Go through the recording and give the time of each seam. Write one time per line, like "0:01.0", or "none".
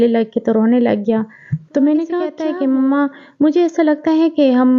0:02.4